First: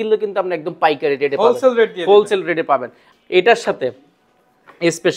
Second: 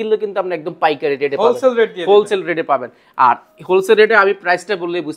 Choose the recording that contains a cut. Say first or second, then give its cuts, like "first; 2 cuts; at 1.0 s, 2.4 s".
first; 1 cut; at 3.0 s